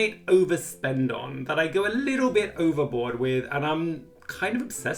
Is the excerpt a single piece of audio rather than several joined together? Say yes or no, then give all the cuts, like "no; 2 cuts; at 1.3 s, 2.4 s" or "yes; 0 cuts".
yes; 0 cuts